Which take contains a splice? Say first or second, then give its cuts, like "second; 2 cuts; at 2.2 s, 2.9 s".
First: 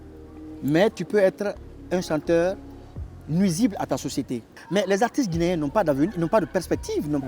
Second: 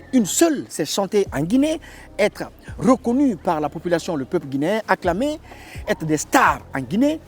first; 1 cut; at 4.5 s